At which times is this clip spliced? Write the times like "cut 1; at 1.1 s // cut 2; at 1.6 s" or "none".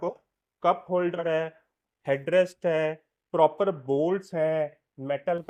none